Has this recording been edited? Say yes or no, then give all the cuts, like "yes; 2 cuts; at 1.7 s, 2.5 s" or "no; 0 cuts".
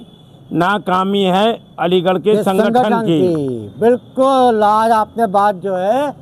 no; 0 cuts